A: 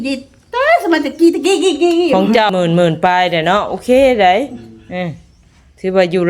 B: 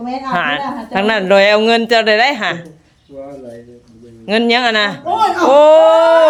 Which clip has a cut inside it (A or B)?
A